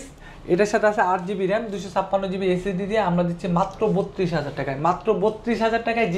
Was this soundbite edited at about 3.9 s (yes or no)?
no